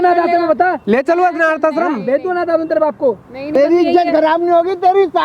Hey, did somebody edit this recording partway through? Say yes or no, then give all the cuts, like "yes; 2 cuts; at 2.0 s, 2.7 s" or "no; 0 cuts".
yes; 1 cut; at 3.5 s